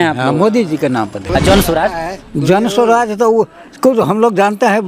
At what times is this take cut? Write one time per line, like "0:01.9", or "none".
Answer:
0:01.3